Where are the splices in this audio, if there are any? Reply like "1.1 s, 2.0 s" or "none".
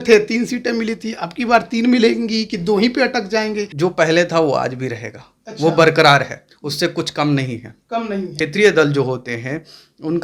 3.7 s, 8.3 s